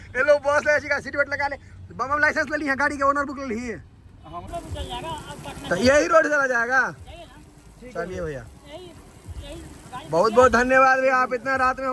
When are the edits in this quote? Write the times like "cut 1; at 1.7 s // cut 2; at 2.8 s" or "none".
cut 1; at 4.5 s

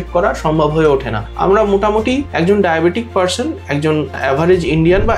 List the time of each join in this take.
cut 1; at 1.2 s // cut 2; at 2.3 s // cut 3; at 4.2 s

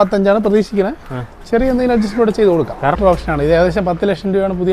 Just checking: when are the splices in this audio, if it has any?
cut 1; at 3.0 s

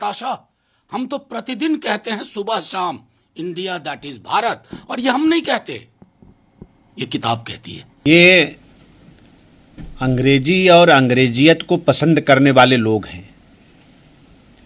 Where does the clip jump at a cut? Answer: cut 1; at 8.1 s

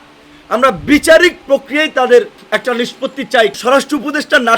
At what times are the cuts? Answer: cut 1; at 2.4 s // cut 2; at 3.5 s

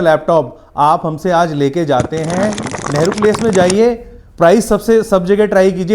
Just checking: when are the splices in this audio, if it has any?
cut 1; at 2.7 s

